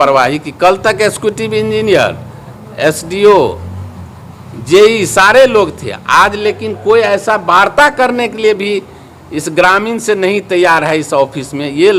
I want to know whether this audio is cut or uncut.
uncut